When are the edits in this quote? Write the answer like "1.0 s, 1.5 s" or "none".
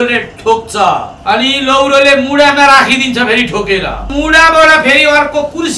1.1 s, 4.1 s

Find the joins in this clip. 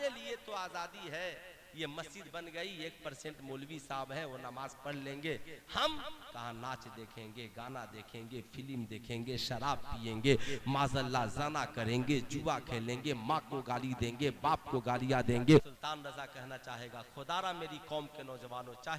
15.7 s

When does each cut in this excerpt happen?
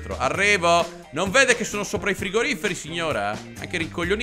none

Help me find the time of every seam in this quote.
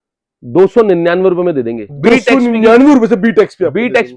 none

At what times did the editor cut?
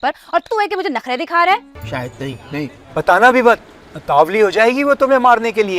1.8 s

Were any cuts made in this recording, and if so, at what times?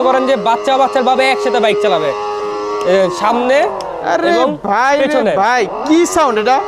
none

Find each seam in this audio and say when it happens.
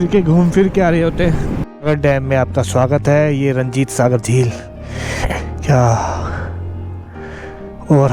1.5 s

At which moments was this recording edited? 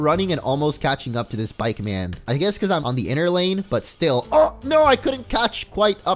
2.8 s

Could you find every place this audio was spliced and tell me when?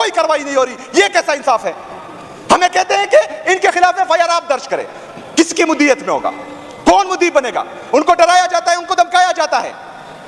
none

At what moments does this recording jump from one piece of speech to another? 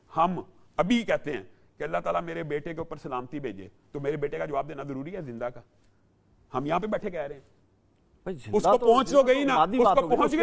none

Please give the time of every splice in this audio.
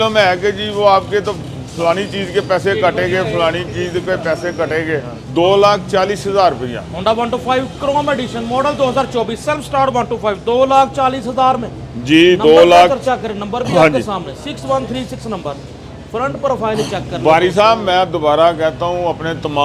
none

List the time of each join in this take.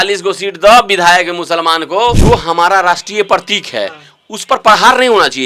2.2 s

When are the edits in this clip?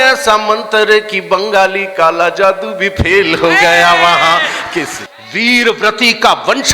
5.0 s

